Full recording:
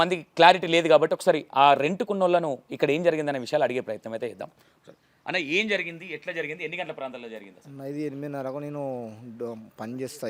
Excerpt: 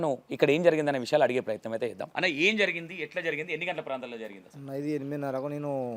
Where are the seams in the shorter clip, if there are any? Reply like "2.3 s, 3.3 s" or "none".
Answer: 2.1 s